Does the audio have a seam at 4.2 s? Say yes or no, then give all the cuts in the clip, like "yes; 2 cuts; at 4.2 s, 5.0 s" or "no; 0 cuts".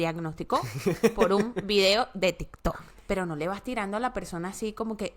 no; 1 cut; at 2.9 s